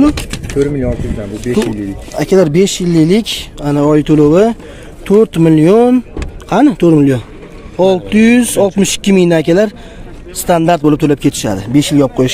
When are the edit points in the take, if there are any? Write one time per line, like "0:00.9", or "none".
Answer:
none